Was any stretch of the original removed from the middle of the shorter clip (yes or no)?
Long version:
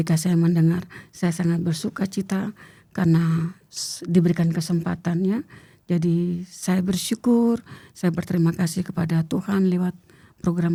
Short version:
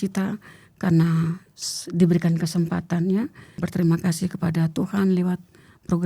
yes